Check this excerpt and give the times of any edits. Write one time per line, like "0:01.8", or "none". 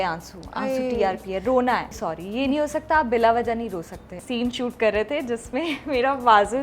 0:01.9
0:04.1